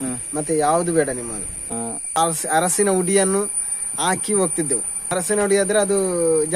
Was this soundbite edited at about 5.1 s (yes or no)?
yes